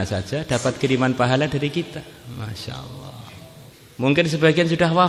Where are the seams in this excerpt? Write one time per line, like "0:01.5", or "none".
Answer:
0:03.7